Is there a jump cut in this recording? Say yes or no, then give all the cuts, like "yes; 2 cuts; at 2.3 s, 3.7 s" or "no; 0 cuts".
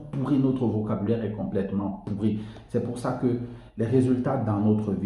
no; 0 cuts